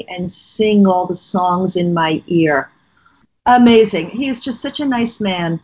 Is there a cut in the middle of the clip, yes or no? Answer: no